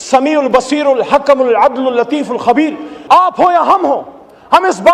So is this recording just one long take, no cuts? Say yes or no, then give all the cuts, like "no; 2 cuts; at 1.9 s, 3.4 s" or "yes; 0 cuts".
no; 1 cut; at 2.9 s